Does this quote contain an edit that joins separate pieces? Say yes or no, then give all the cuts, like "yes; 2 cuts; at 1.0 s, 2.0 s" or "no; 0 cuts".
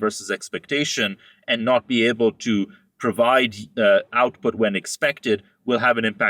no; 0 cuts